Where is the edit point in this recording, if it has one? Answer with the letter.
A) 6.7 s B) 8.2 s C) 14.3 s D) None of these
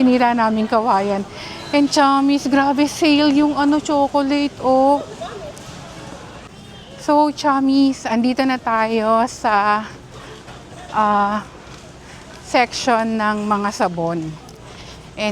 A